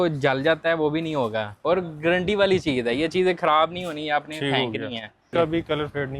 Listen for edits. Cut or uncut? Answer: cut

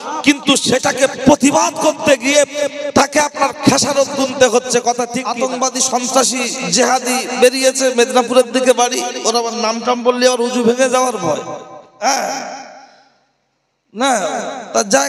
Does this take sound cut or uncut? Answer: cut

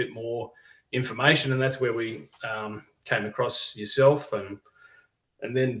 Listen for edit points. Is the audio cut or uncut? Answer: uncut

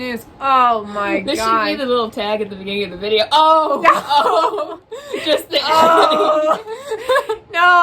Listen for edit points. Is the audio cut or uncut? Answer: uncut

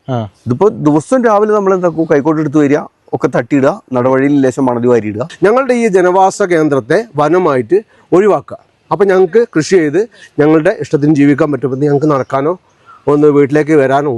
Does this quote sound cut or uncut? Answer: cut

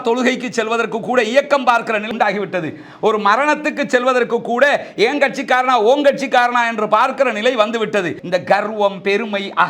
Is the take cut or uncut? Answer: cut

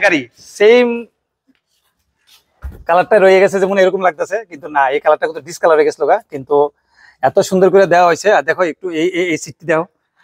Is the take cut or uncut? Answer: uncut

